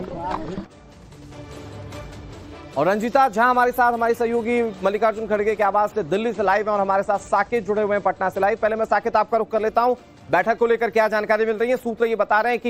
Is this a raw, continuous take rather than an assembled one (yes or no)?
no